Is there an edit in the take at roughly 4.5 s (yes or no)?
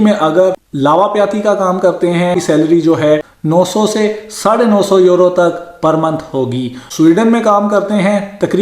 no